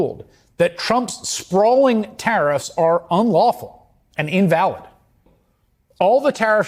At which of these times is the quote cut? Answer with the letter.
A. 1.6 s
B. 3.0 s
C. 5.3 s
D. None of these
C